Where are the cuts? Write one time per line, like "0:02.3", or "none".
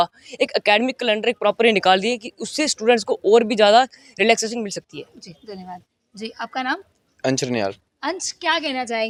none